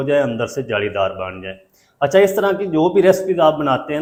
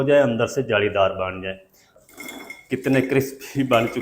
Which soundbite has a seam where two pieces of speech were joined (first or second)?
second